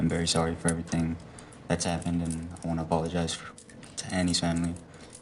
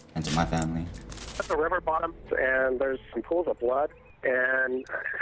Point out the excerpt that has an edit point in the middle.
second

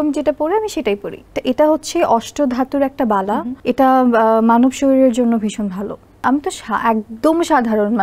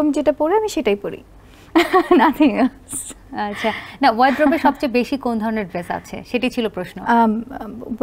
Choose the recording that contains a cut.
first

